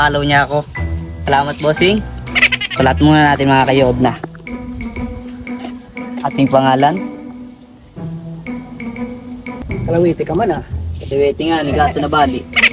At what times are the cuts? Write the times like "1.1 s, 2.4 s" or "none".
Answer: 9.6 s